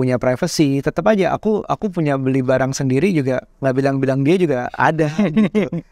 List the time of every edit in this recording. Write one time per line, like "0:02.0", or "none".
none